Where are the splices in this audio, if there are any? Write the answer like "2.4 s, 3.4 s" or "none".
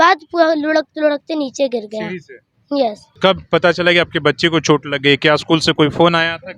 3.1 s